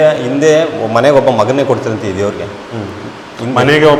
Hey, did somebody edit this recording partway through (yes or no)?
no